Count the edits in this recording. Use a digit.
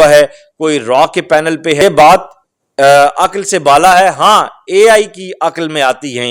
1